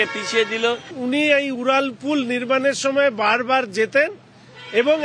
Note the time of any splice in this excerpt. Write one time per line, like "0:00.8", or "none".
0:00.9